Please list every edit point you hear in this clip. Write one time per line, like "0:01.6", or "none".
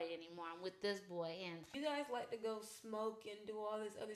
0:01.6

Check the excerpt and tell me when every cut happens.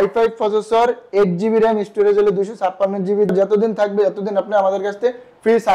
0:03.3

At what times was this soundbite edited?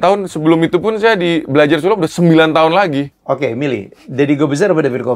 0:03.1

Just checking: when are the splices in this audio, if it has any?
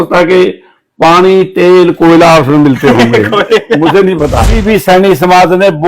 0:04.6

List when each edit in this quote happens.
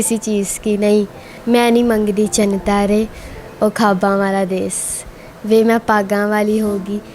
0:01.3

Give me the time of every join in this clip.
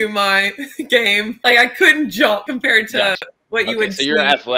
0:01.4
0:02.4

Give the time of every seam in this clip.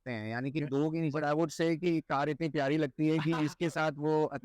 0:01.2

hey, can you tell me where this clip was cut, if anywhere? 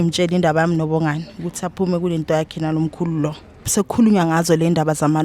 0:03.7

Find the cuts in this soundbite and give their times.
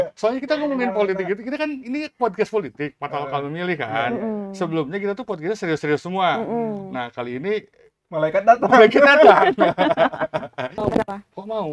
0:10.7

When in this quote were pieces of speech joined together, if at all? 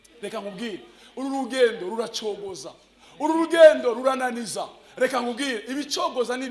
none

